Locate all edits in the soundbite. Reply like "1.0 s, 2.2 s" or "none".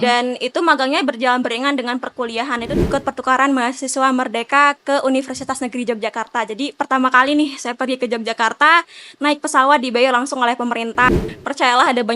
2.8 s, 11.1 s